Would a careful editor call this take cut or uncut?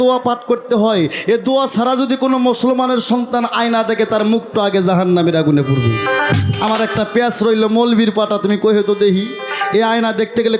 uncut